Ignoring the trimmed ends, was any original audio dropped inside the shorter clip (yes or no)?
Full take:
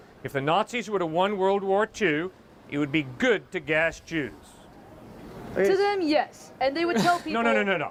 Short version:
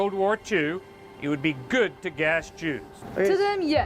yes